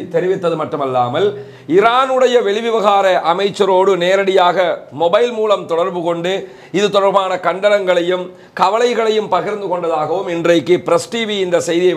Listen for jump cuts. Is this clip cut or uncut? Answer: uncut